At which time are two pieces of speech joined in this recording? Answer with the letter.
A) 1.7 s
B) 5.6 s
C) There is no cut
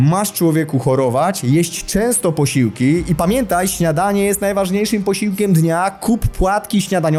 C